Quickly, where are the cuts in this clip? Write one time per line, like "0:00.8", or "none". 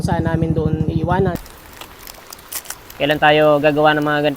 0:01.4